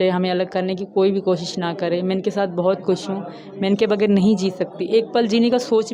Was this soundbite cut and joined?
no; 0 cuts

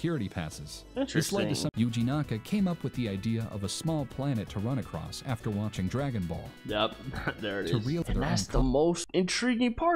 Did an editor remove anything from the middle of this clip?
yes; 3 cuts; at 1.7 s, 8.0 s, 9.0 s

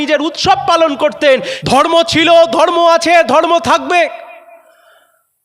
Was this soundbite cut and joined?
yes; 1 cut; at 1.5 s

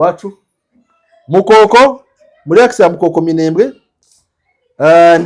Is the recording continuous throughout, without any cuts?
yes; 0 cuts

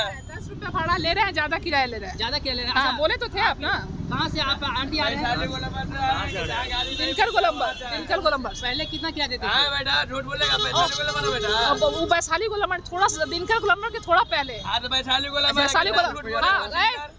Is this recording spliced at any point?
no; 0 cuts

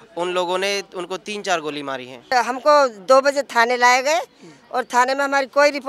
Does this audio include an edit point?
yes; 1 cut; at 2.3 s

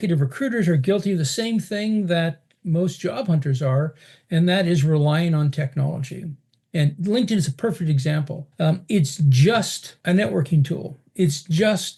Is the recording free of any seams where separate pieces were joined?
yes; 0 cuts

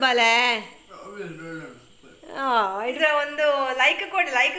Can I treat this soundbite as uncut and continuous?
no; 1 cut; at 2.9 s

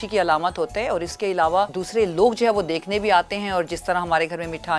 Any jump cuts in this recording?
yes; 1 cut; at 1.8 s

